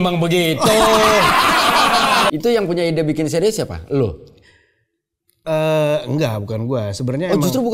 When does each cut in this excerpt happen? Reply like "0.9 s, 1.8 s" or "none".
2.3 s